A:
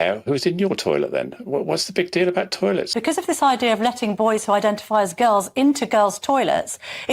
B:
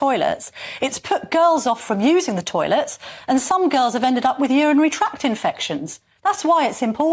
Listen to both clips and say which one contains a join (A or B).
A